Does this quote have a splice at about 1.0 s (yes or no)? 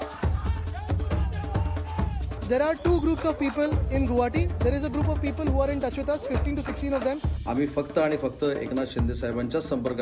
yes